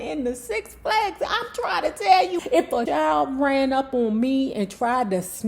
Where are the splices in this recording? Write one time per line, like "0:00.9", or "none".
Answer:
0:02.5